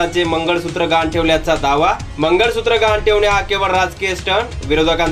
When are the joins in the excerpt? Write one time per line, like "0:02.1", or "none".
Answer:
none